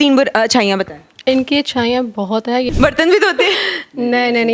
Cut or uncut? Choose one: cut